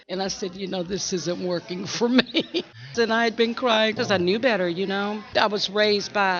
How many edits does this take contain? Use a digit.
3